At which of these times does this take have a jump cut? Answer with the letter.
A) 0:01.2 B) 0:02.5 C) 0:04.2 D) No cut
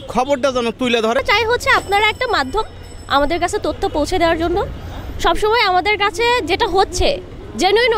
A